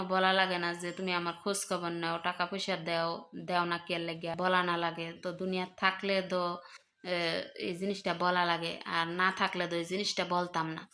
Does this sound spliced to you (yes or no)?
yes